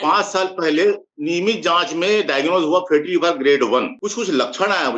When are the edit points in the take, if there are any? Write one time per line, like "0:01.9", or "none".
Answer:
0:01.1
0:03.9